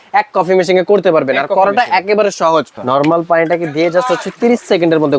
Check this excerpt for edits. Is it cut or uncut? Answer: cut